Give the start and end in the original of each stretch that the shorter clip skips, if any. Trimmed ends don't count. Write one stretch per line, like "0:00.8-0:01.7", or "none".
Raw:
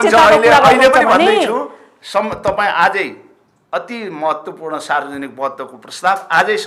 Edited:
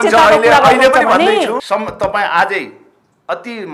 0:01.6-0:02.1